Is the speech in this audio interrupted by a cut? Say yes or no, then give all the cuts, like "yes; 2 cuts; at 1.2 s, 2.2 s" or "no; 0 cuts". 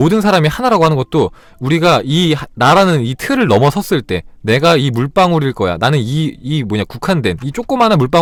no; 0 cuts